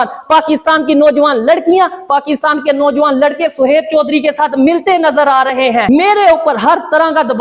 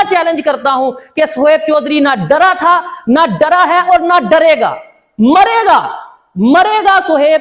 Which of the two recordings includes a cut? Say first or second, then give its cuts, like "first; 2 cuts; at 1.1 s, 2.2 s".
first; 1 cut; at 5.9 s